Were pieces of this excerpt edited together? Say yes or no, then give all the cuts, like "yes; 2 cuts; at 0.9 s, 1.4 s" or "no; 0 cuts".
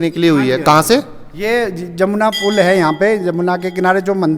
no; 0 cuts